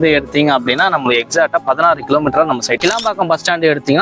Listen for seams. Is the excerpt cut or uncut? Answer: cut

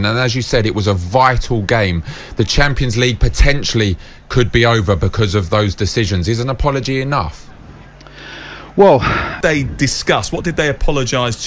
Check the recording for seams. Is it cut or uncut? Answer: cut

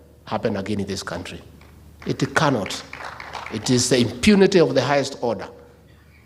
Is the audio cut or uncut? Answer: uncut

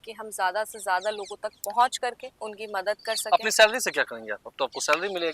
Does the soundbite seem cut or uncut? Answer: uncut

